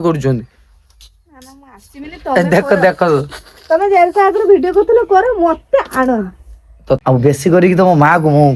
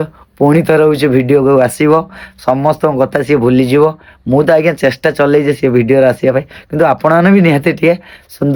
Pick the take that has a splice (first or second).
first